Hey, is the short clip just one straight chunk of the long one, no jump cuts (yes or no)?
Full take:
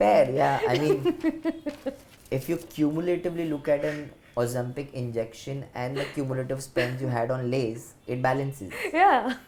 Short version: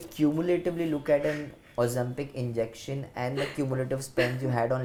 yes